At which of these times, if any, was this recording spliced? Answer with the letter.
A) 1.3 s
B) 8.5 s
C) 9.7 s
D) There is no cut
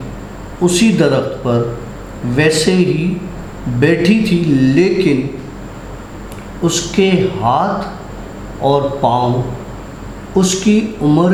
D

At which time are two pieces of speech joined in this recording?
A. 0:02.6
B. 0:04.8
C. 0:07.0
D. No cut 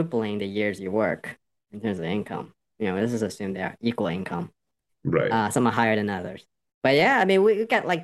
A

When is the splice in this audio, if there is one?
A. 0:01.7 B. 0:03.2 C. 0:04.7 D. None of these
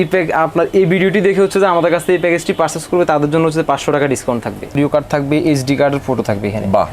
C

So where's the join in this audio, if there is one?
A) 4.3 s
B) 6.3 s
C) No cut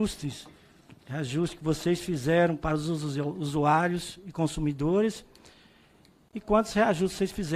C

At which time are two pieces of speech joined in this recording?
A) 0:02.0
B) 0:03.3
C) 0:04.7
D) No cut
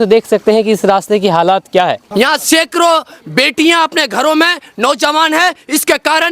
A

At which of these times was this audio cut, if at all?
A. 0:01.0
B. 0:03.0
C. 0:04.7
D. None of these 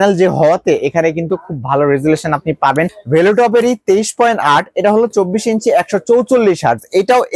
B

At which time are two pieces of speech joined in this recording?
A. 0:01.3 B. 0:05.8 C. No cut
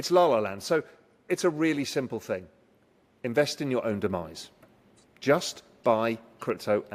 C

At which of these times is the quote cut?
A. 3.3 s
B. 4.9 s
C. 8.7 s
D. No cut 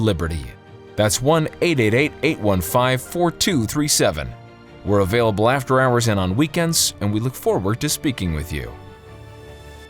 C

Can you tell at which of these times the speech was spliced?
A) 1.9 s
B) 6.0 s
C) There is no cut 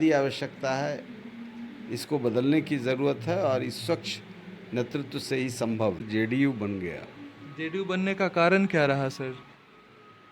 B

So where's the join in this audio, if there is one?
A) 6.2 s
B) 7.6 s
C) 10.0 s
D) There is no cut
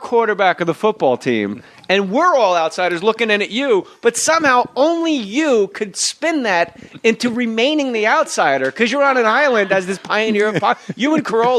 C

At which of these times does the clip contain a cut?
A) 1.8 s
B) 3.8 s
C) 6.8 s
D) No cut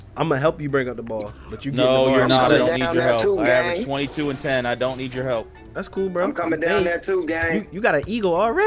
D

